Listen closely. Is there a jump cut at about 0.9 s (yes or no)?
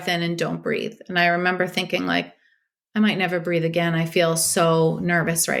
no